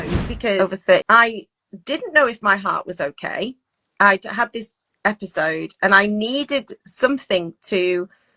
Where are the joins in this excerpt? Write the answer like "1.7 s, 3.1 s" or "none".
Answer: 1.0 s

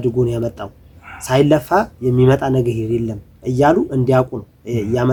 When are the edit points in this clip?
none

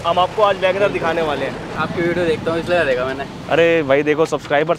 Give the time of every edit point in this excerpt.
1.7 s

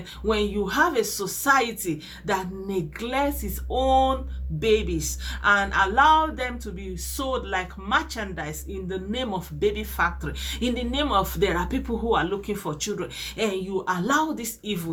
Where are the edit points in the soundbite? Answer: none

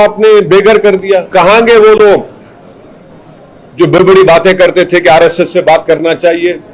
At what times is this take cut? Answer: 1.3 s

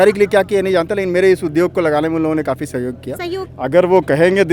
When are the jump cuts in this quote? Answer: 3.5 s

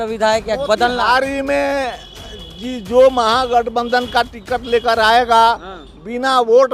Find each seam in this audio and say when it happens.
none

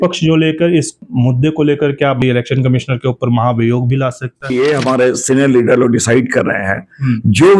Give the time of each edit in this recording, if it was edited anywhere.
1.0 s, 2.2 s, 4.5 s

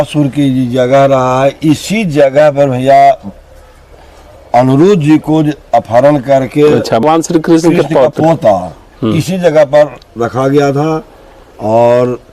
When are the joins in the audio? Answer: 6.8 s

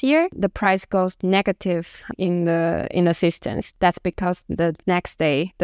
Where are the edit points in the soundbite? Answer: none

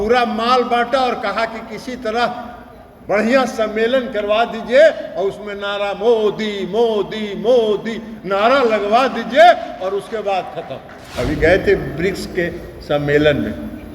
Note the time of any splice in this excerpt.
11.0 s

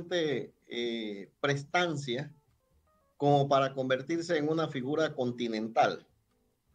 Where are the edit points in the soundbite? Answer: none

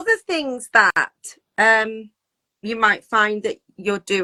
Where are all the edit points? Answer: none

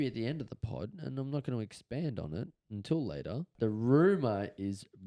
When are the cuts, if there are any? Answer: 3.5 s

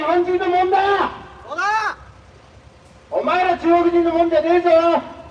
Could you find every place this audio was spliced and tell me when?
none

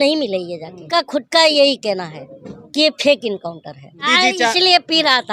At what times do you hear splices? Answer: 0.8 s, 4.1 s

